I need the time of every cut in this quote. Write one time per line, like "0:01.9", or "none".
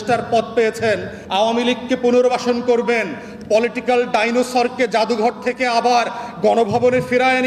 0:01.2